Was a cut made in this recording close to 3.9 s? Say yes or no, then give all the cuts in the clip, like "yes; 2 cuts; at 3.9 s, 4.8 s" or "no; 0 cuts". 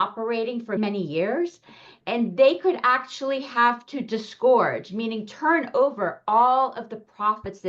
no; 2 cuts; at 0.8 s, 2.0 s